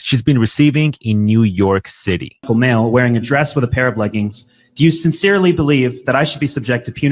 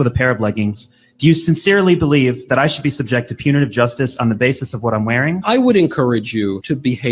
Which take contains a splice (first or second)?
first